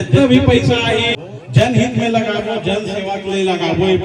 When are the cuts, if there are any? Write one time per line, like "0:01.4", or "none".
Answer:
0:01.2